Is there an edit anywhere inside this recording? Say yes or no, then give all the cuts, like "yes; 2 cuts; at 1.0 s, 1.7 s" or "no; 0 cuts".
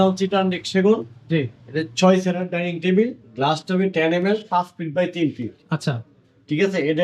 no; 0 cuts